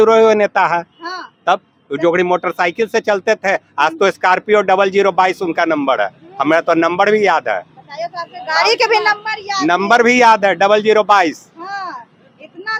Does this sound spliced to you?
no; 0 cuts

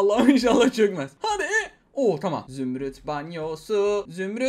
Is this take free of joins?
no; 1 cut; at 2.4 s

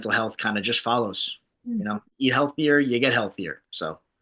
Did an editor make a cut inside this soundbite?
yes; 1 cut; at 2.1 s

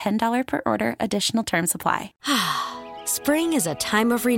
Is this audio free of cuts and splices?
no; 1 cut; at 2.1 s

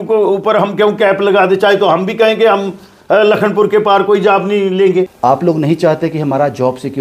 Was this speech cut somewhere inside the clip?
yes; 1 cut; at 5.1 s

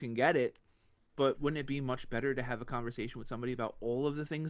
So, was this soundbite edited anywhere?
yes; 1 cut; at 1.4 s

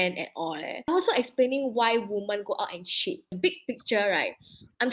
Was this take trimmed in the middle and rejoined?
yes; 2 cuts; at 0.9 s, 3.3 s

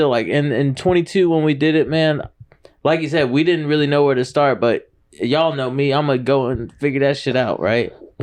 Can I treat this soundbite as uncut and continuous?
yes; 0 cuts

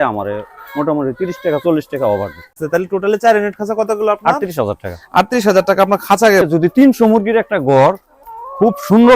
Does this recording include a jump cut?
yes; 2 cuts; at 2.6 s, 6.4 s

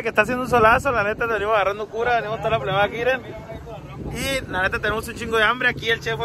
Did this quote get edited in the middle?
no; 0 cuts

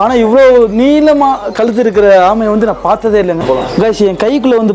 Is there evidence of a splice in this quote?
yes; 1 cut; at 3.4 s

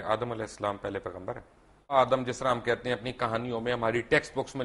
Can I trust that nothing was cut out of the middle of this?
no; 1 cut; at 1.9 s

